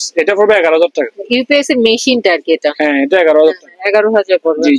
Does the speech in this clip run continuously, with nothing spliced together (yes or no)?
yes